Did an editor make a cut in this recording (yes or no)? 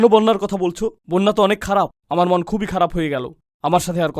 no